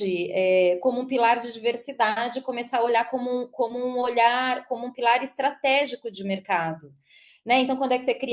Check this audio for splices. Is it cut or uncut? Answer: uncut